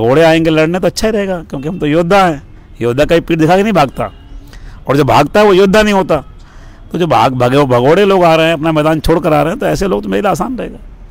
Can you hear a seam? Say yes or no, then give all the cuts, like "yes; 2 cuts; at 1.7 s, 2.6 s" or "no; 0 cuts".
no; 0 cuts